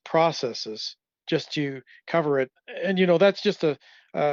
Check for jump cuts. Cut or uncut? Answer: cut